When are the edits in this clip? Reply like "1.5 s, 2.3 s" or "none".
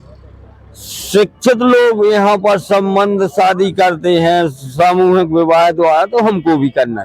none